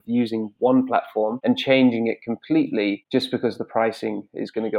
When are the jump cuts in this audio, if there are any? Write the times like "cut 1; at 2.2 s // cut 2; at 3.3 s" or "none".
cut 1; at 1.4 s // cut 2; at 3.0 s